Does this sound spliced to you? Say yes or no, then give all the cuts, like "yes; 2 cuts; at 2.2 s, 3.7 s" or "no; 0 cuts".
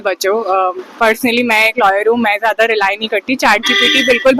no; 0 cuts